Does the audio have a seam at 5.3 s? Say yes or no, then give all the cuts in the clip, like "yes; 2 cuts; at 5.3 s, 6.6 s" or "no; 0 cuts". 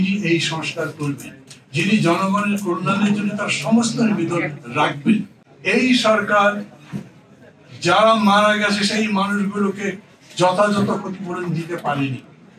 yes; 1 cut; at 5.3 s